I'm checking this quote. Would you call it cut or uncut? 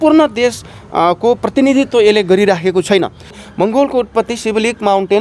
cut